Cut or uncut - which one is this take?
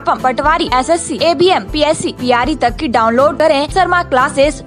uncut